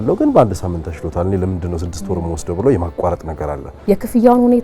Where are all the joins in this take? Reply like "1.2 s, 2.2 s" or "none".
3.7 s